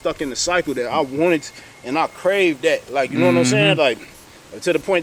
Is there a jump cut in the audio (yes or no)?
no